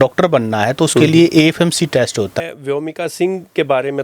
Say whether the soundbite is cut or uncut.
cut